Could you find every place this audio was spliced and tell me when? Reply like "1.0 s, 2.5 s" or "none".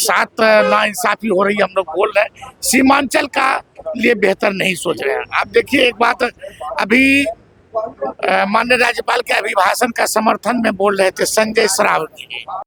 none